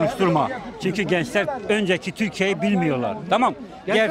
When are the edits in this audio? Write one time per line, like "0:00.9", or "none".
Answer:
none